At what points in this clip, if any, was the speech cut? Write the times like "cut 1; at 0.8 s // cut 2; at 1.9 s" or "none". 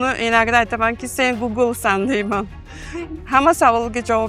none